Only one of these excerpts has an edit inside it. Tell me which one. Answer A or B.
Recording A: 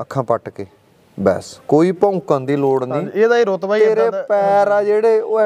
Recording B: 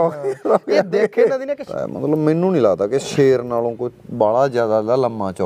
B